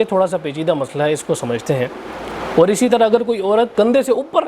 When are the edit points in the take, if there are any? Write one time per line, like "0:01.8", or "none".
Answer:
0:02.1
0:03.7